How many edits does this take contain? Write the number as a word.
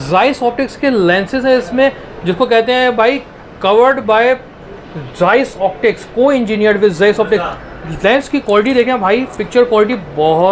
zero